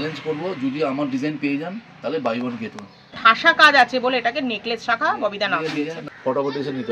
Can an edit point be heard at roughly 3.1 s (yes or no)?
yes